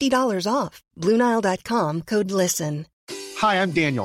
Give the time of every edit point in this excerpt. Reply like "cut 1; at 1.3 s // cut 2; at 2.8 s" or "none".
cut 1; at 2.9 s